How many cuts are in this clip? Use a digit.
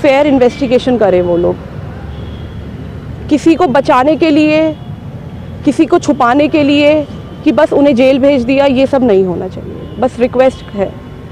0